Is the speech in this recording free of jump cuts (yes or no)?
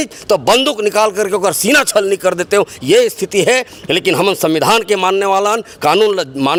yes